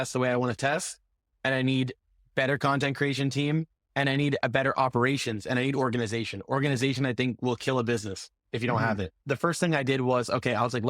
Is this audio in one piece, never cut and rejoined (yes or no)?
no